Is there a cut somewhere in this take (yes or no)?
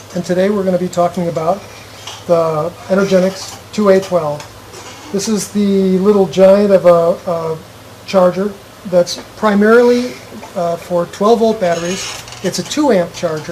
yes